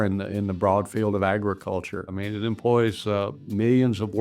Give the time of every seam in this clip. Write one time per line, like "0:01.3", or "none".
0:02.1

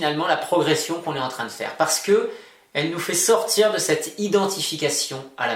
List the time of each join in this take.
none

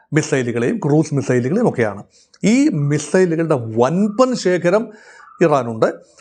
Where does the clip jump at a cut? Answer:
none

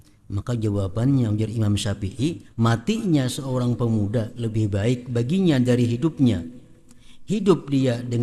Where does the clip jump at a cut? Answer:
0:02.4

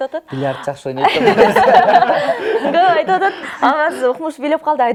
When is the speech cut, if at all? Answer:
none

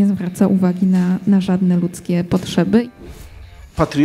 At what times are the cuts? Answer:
0:03.1

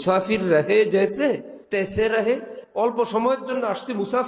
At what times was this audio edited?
0:01.5
0:02.6

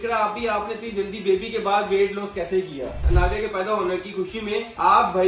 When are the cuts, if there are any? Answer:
0:03.0

